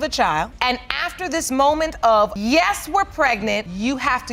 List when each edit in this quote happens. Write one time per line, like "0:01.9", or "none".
none